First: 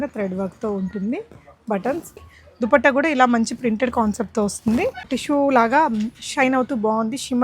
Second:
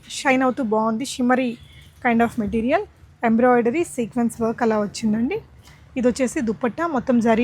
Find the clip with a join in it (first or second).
first